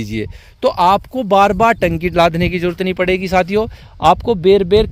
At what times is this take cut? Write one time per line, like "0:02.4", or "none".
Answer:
none